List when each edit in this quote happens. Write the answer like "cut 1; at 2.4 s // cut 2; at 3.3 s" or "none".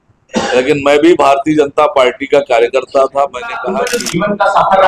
cut 1; at 3.8 s